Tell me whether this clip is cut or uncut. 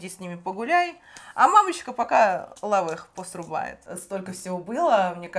cut